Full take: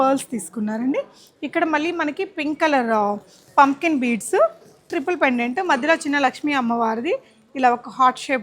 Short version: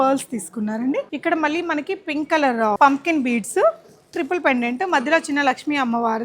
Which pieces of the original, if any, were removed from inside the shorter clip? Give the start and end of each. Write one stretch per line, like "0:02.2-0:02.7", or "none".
0:01.1-0:01.4
0:03.1-0:03.5